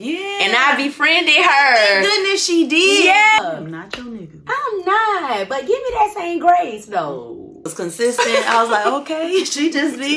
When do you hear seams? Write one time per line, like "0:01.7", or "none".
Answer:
0:03.4
0:07.7